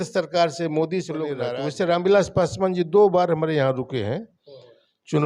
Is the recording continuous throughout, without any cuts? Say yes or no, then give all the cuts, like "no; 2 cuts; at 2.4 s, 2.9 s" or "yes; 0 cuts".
no; 1 cut; at 1.4 s